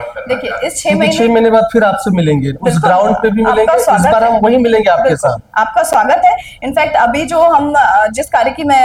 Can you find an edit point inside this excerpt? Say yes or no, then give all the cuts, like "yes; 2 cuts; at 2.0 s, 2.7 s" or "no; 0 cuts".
no; 0 cuts